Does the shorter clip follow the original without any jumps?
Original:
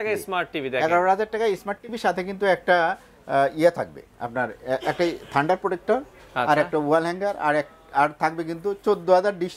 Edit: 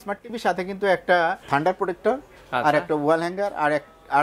no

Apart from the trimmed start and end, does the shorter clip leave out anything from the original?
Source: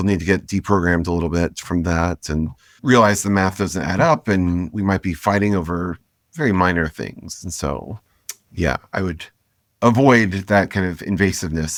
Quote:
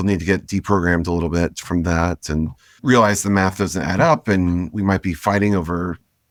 no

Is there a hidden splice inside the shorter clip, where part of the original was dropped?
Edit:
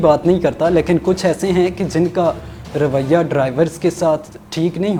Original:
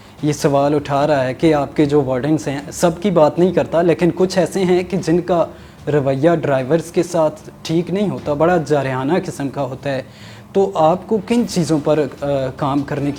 no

